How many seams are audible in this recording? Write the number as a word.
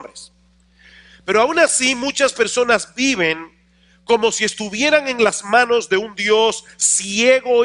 one